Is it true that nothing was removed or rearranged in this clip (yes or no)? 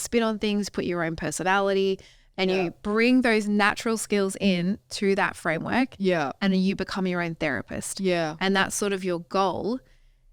yes